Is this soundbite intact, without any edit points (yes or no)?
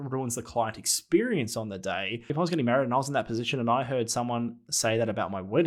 no